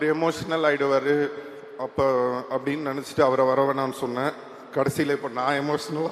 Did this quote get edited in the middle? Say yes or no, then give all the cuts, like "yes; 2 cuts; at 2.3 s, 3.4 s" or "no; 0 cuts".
no; 0 cuts